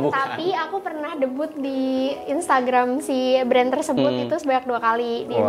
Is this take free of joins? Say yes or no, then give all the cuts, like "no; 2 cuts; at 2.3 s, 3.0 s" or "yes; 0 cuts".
yes; 0 cuts